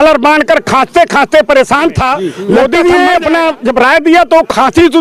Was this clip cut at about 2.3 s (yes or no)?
yes